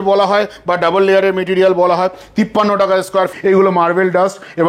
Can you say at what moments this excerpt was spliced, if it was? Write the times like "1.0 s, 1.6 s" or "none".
3.3 s